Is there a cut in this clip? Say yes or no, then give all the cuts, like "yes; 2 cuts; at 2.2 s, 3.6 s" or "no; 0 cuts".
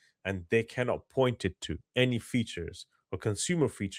no; 0 cuts